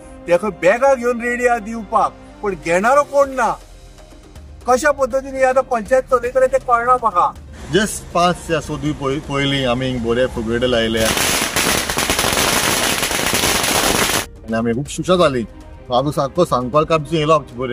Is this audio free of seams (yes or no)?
no